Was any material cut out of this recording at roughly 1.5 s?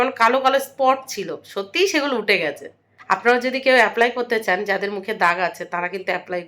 no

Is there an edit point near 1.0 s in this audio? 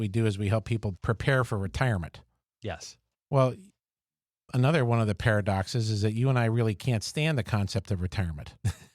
yes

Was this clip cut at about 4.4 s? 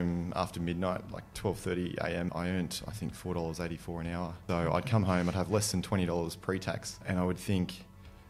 yes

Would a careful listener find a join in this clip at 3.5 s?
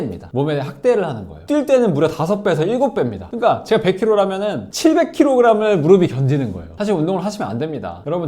no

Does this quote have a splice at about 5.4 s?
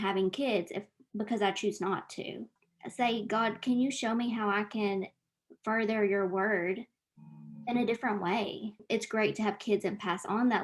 no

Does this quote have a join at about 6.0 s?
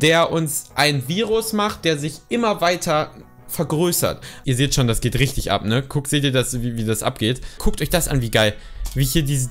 no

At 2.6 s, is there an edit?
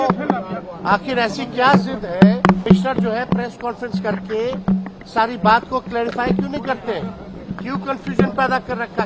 yes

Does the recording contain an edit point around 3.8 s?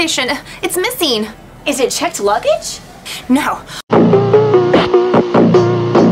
yes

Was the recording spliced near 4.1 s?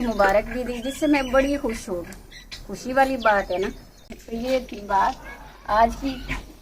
yes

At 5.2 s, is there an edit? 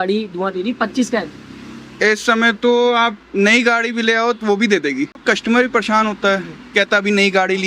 yes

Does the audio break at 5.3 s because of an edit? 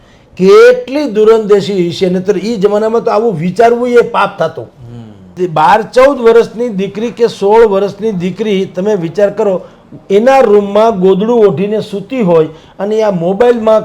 yes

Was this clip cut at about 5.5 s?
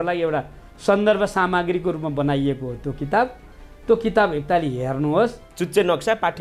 yes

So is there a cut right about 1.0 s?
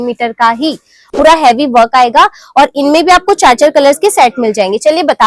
yes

